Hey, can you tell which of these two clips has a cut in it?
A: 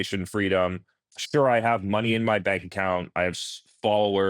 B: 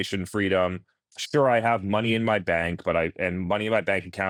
A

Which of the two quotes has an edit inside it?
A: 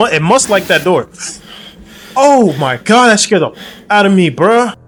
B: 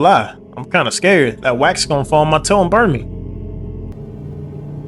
B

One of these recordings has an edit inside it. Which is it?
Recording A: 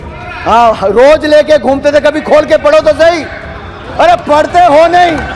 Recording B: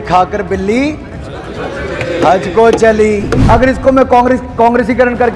B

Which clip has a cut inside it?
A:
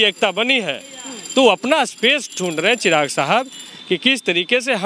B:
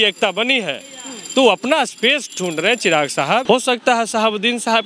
B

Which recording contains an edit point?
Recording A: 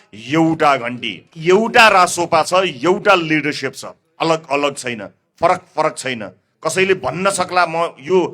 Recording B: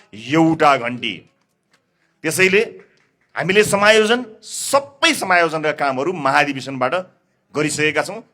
A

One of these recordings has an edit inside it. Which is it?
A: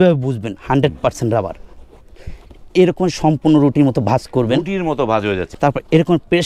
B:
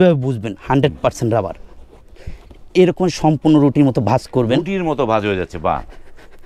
A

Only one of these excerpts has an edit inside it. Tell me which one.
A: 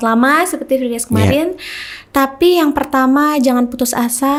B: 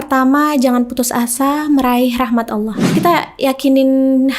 B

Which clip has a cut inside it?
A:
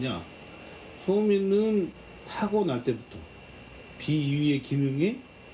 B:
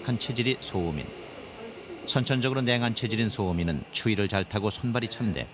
B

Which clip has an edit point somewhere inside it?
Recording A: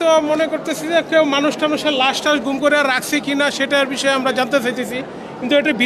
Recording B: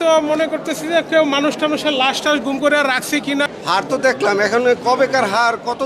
B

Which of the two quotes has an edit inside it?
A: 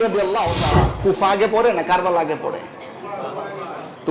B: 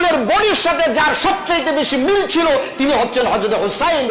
A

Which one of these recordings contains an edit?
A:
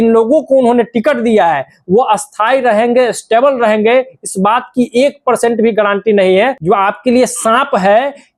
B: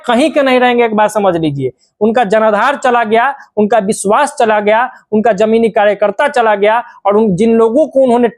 A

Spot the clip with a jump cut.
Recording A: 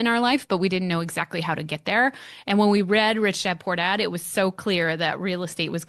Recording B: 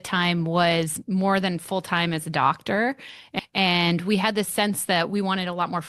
B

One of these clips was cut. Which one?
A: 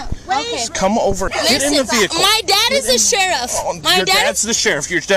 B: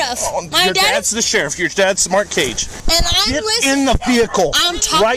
A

